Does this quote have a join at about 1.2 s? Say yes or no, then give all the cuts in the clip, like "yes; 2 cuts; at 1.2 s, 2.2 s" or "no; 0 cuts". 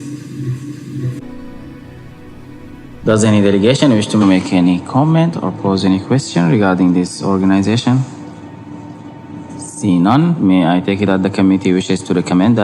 yes; 1 cut; at 1.2 s